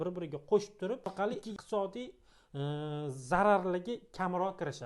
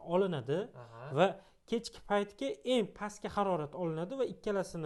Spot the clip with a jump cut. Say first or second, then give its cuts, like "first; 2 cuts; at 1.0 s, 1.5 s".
first; 1 cut; at 1.1 s